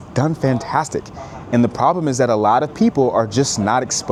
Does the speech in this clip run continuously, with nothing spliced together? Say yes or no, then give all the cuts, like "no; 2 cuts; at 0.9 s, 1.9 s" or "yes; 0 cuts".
yes; 0 cuts